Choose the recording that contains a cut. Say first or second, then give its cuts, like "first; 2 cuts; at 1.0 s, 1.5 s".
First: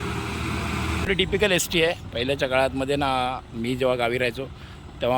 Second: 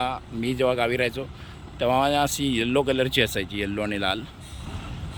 first; 1 cut; at 1.1 s